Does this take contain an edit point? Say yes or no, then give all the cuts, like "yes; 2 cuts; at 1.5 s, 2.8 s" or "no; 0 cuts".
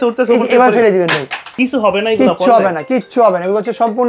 yes; 1 cut; at 1.5 s